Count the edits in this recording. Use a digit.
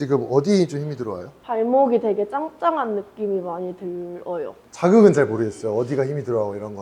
1